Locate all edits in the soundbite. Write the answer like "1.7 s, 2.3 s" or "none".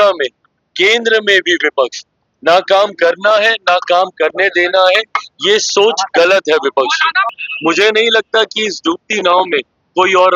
7.3 s, 9.3 s